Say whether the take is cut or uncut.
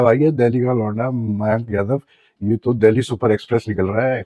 uncut